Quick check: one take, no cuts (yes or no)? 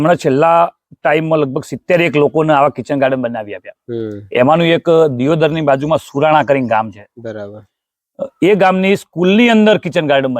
yes